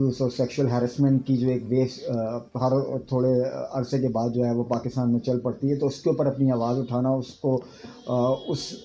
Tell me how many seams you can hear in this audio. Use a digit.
0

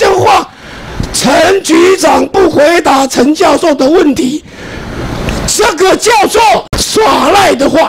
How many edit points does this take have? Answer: 1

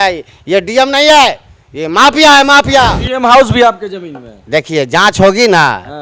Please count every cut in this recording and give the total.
1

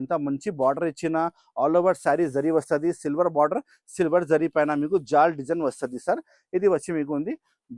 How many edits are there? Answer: 0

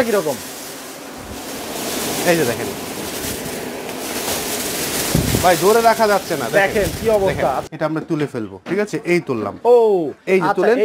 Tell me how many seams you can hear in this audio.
1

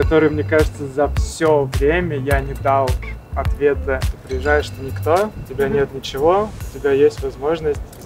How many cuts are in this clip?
1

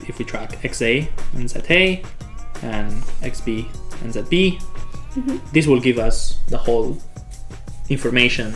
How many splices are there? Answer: 0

